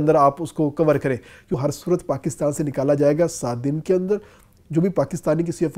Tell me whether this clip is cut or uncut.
cut